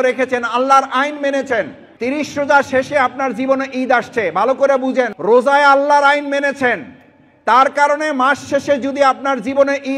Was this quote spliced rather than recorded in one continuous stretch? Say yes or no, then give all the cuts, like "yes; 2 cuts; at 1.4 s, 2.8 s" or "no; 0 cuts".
yes; 2 cuts; at 1.8 s, 5.1 s